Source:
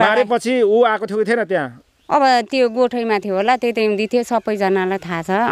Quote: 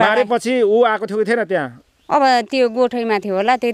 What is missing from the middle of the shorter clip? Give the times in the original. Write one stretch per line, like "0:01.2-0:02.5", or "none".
none